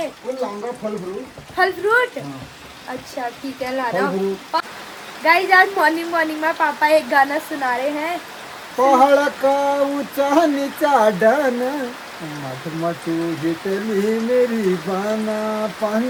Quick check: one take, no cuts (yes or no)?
yes